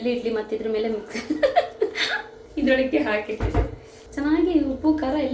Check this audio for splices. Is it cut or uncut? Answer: uncut